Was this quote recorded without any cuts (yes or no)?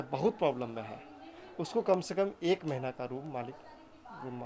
yes